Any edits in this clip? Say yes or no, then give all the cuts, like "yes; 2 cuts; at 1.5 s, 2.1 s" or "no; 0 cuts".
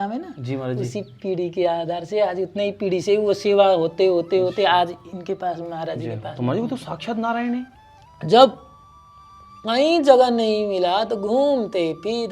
yes; 1 cut; at 7.7 s